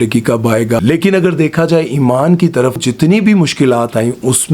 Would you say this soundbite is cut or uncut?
cut